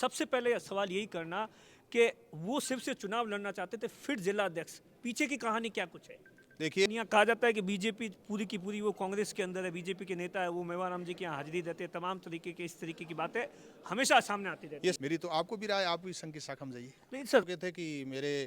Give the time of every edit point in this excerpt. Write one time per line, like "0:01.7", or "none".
0:06.9
0:15.0
0:17.5